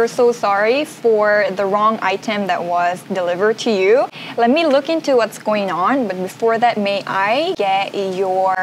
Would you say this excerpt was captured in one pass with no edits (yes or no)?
yes